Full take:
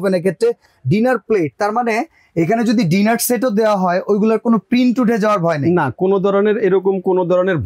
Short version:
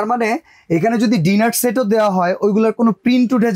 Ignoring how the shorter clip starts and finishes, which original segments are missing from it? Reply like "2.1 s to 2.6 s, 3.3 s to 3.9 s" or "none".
none